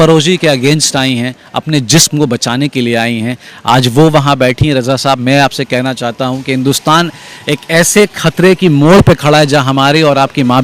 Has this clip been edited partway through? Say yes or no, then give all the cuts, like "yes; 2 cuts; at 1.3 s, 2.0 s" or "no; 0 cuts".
no; 0 cuts